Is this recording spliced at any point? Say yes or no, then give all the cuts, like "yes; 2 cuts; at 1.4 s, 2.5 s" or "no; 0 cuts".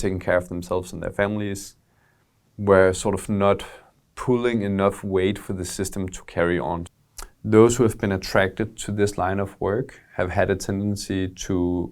yes; 1 cut; at 6.9 s